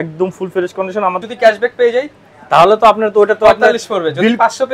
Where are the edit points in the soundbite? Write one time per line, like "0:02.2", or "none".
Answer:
0:01.2

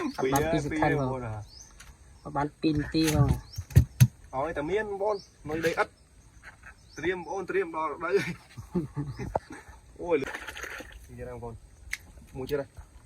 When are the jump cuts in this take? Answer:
0:10.2

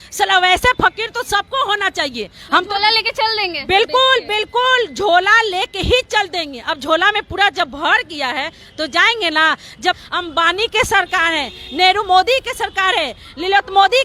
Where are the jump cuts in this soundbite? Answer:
0:10.0

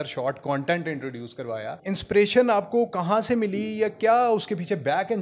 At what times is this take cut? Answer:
0:01.8

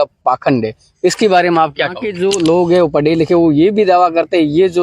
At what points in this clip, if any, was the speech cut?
0:02.1

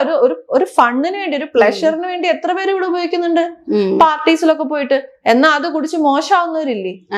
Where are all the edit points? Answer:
none

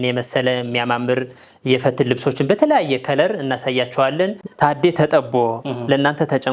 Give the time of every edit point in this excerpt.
0:04.4

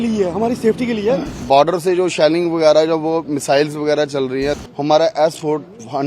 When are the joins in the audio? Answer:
0:01.4
0:04.6

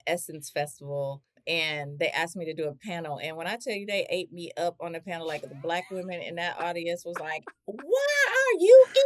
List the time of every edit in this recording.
0:01.4

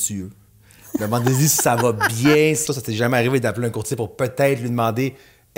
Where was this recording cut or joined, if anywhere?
0:02.6

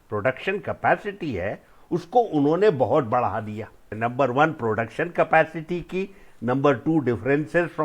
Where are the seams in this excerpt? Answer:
0:03.9

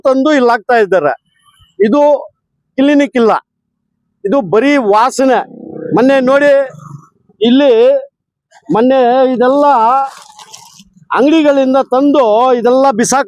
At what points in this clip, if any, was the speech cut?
none

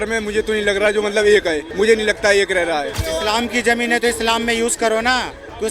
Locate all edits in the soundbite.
0:01.7
0:03.0

